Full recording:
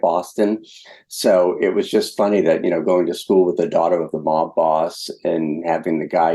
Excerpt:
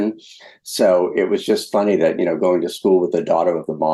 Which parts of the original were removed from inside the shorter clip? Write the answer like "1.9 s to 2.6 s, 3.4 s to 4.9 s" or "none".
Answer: none